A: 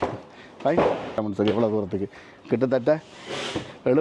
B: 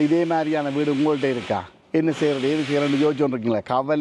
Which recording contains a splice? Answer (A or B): A